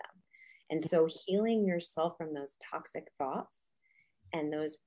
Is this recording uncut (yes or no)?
yes